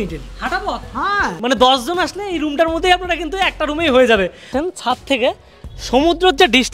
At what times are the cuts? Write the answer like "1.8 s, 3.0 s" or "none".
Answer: 1.4 s, 4.5 s